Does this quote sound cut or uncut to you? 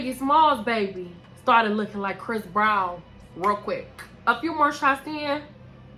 uncut